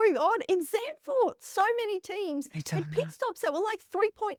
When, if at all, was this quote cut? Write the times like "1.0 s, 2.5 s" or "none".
none